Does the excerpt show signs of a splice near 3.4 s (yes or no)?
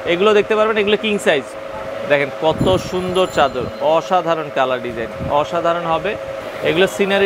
no